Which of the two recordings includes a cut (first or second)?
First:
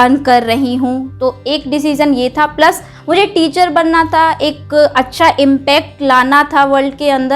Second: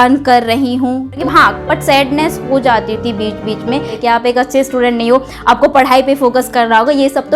second